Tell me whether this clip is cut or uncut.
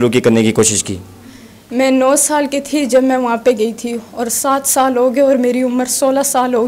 uncut